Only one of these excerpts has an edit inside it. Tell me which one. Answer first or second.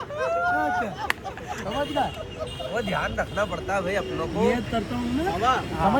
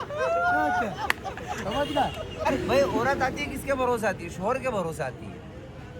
second